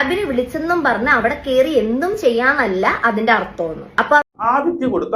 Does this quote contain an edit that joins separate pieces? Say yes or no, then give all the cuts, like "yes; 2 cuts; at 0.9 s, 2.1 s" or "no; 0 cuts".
yes; 1 cut; at 4.2 s